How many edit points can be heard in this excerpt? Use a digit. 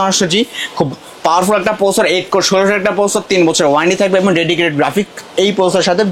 0